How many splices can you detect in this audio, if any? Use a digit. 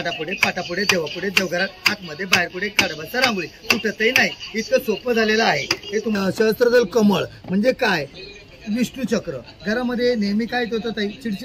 1